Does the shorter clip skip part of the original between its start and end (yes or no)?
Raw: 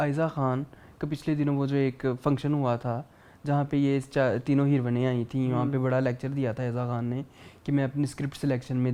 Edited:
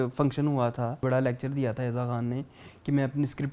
yes